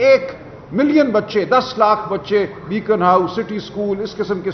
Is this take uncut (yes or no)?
no